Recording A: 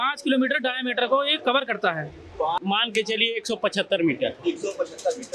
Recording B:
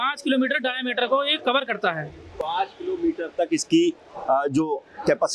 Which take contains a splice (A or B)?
A